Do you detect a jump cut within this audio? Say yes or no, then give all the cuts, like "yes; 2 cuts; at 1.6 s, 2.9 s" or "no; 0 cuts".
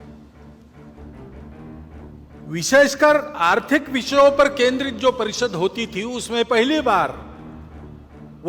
no; 0 cuts